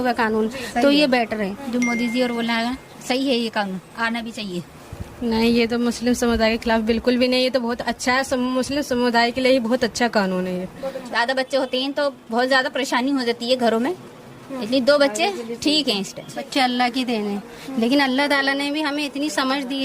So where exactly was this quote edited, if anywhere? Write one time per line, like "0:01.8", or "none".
0:01.6
0:04.8
0:11.0
0:16.4